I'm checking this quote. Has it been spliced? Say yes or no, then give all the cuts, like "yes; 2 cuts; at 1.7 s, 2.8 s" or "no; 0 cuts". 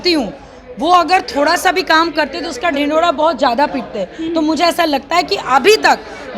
no; 0 cuts